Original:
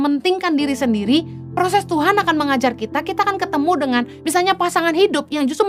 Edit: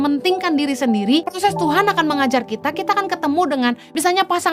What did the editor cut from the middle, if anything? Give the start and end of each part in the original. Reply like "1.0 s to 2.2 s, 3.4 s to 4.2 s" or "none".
1.3 s to 1.6 s